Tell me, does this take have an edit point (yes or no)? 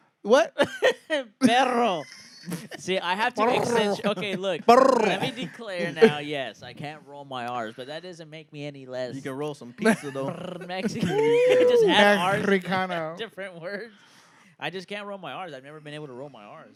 no